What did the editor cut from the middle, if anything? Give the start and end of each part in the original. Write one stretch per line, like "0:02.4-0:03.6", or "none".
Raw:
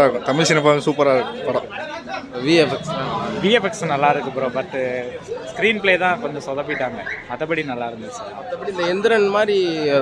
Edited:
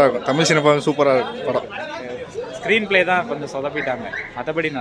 0:02.2-0:05.1